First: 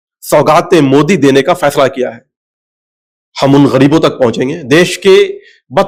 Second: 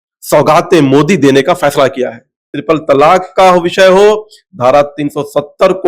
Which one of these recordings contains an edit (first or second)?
second